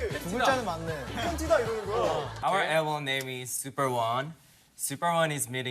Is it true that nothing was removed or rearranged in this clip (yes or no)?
no